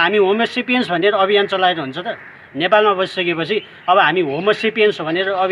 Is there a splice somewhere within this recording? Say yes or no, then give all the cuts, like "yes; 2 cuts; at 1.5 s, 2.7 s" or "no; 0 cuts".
no; 0 cuts